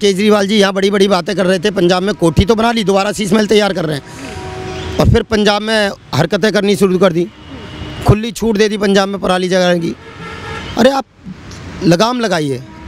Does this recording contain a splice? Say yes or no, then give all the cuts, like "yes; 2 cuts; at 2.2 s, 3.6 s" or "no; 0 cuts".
no; 0 cuts